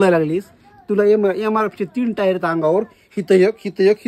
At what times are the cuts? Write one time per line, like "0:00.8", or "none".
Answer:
none